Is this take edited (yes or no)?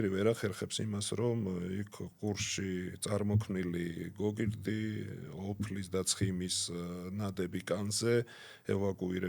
no